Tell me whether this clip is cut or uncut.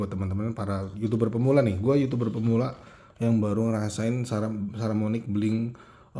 uncut